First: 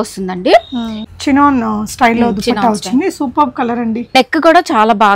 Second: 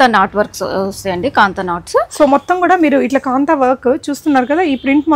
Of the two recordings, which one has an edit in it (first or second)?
first